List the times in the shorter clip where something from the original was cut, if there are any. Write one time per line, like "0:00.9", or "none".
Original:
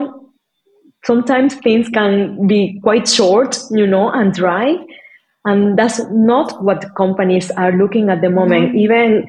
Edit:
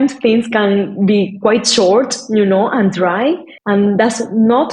0:03.5